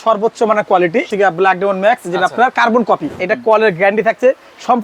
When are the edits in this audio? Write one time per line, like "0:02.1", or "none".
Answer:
0:01.1
0:03.1